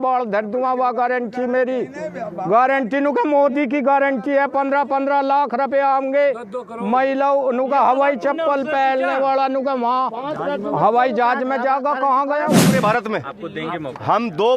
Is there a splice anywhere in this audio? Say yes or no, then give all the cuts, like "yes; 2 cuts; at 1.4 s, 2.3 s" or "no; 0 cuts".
yes; 1 cut; at 12.6 s